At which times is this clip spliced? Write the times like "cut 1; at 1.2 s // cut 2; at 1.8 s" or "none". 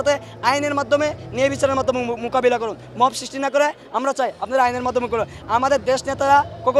cut 1; at 5.4 s